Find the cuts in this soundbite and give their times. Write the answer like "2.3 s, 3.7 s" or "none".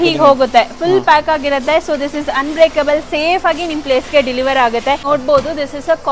5.0 s

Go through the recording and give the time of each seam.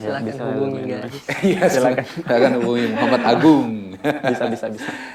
none

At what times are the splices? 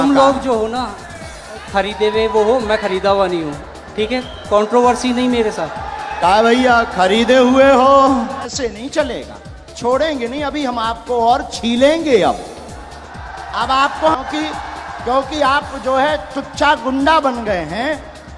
8.5 s, 14.2 s

